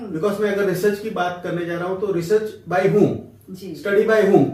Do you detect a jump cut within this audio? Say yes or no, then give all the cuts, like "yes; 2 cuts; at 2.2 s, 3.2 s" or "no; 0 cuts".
no; 0 cuts